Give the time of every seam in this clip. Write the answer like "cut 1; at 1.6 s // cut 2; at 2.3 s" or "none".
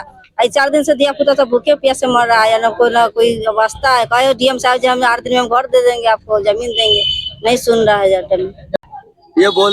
cut 1; at 8.7 s